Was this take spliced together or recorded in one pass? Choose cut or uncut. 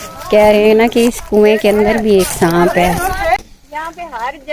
cut